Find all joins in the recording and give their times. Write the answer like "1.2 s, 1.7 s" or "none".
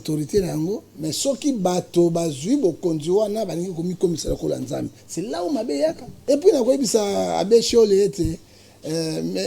6.1 s